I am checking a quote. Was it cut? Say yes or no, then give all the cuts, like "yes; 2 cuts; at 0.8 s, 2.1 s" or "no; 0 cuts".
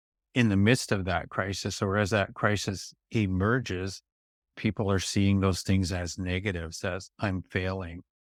no; 0 cuts